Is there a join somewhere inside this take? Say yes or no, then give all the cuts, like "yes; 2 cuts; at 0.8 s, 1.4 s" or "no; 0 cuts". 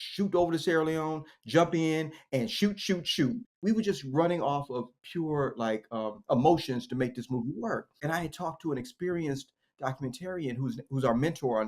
yes; 2 cuts; at 3.5 s, 7.9 s